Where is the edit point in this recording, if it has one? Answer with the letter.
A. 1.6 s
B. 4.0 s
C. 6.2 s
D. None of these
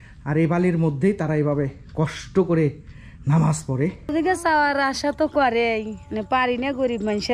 B